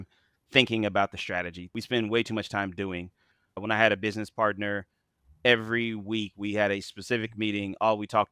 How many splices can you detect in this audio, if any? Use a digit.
2